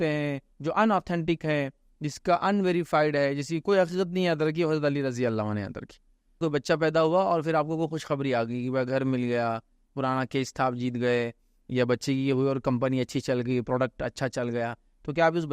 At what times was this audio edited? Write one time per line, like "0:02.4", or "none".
0:06.4